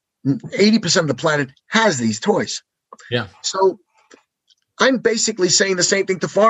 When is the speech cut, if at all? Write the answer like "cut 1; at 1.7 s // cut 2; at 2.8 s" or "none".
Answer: cut 1; at 2.8 s